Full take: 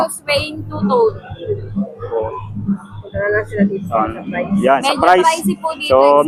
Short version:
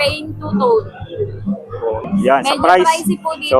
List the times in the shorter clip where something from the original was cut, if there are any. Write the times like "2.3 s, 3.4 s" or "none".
2.1 s